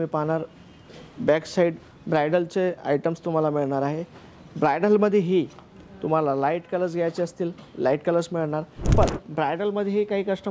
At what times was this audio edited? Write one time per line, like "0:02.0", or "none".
0:08.9